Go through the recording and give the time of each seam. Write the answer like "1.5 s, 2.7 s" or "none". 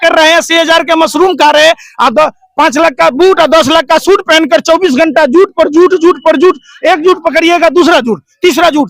none